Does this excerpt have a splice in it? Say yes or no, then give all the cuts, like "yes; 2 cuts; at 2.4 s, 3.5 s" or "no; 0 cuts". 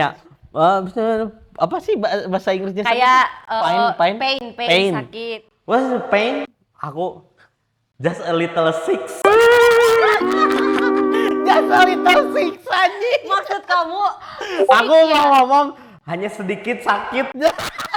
no; 0 cuts